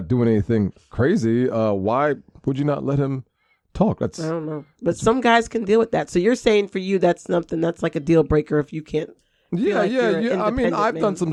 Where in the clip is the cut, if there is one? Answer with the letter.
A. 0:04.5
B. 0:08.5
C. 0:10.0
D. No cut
D